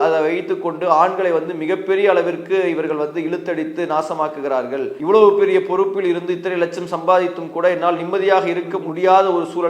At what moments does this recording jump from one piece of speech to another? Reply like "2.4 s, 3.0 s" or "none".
4.9 s